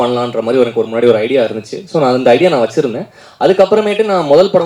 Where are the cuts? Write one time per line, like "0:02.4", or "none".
none